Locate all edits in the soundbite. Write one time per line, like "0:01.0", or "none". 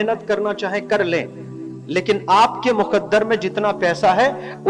none